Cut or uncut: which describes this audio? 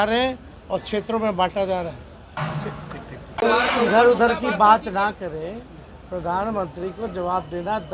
cut